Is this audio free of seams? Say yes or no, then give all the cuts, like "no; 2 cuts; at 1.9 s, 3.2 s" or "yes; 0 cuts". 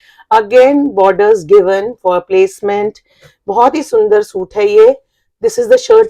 yes; 0 cuts